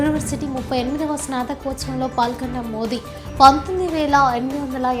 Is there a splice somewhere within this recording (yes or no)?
no